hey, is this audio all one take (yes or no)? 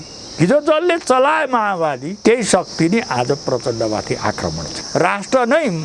no